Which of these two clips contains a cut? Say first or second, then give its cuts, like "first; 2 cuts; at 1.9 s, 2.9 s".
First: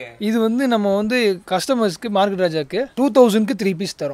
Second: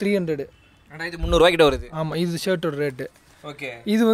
first; 2 cuts; at 1.4 s, 2.9 s